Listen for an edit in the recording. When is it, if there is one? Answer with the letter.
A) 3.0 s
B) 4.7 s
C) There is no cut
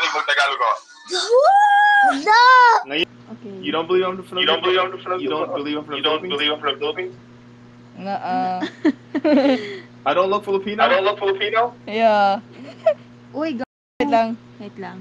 A